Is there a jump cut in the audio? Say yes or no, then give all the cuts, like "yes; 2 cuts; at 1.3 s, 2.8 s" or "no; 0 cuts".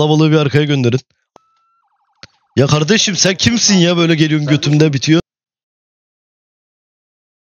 no; 0 cuts